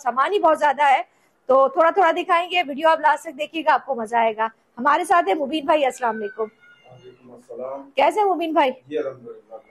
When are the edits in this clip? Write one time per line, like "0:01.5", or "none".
none